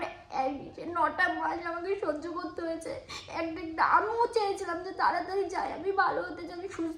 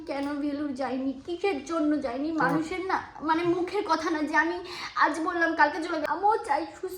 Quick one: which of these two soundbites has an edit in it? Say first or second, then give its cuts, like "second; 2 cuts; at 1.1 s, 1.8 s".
second; 1 cut; at 6.0 s